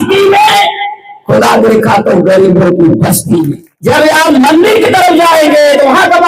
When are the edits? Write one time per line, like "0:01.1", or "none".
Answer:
0:03.6